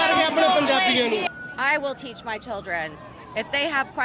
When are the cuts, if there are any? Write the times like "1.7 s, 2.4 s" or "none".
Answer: 1.2 s

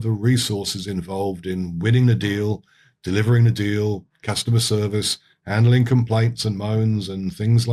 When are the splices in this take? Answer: none

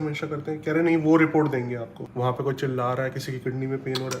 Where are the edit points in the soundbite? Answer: 2.0 s

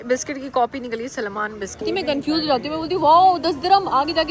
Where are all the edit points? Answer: 1.8 s

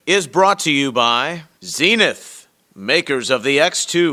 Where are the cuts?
1.4 s

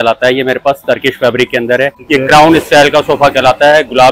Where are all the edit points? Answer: 2.0 s

